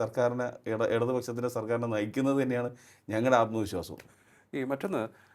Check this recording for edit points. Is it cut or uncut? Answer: uncut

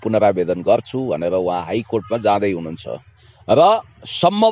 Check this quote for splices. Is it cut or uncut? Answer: uncut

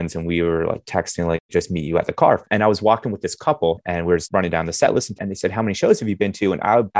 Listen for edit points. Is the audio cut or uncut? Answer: cut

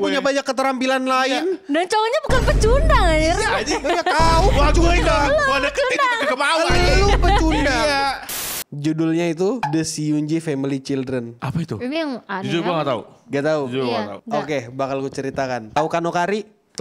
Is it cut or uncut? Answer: cut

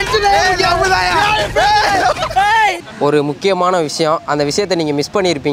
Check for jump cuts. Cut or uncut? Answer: cut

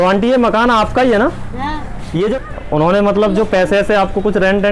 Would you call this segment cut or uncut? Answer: cut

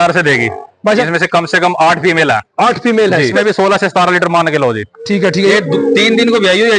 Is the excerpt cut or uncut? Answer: cut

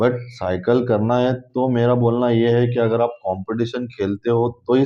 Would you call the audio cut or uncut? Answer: uncut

